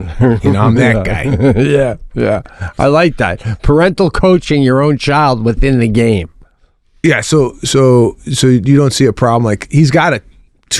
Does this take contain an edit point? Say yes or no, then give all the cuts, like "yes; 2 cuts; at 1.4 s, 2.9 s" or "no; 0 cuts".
no; 0 cuts